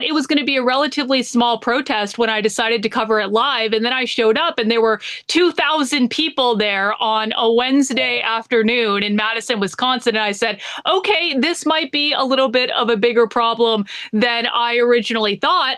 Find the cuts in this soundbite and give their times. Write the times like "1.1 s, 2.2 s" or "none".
none